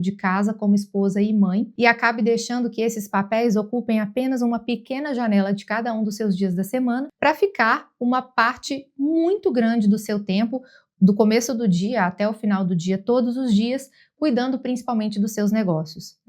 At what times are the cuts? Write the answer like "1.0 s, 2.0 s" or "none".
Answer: 1.7 s, 7.1 s